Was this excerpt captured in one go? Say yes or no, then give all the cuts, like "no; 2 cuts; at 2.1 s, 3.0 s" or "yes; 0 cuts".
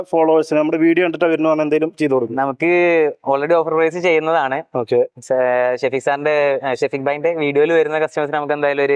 yes; 0 cuts